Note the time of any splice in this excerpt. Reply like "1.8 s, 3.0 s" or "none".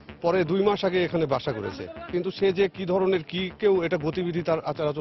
none